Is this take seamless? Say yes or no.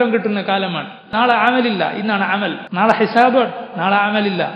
no